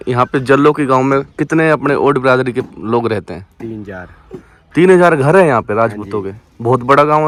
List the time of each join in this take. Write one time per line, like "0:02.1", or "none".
none